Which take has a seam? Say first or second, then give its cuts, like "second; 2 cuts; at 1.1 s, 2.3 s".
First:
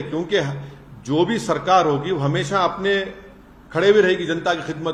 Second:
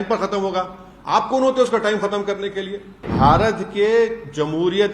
second; 1 cut; at 3.0 s